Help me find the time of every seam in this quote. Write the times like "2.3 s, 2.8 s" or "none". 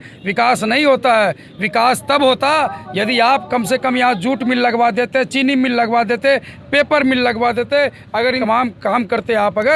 none